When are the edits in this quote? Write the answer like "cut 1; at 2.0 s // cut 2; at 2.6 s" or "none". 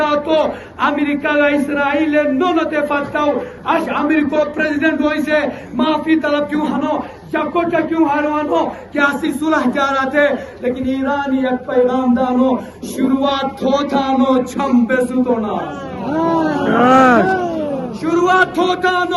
none